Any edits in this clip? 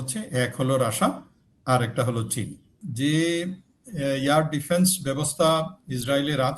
yes; 1 cut; at 2.8 s

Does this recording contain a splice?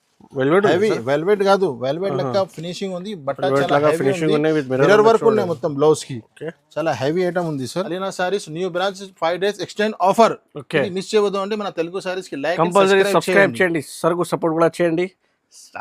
yes; 1 cut; at 7.9 s

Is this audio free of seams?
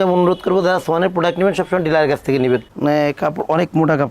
no; 1 cut; at 2.7 s

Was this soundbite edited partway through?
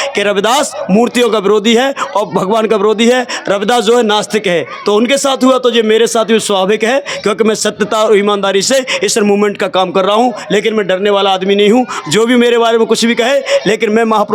no; 0 cuts

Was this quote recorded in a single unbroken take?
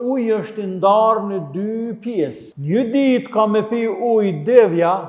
no; 1 cut; at 2.5 s

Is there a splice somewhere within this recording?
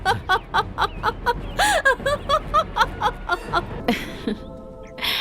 yes; 1 cut; at 3.7 s

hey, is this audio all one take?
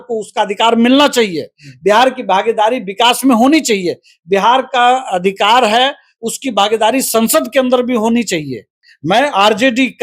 no; 1 cut; at 8.9 s

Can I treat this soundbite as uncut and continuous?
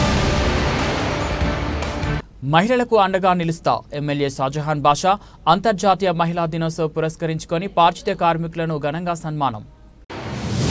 no; 1 cut; at 2.0 s

